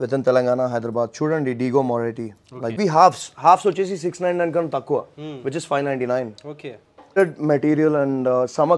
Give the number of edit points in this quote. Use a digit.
2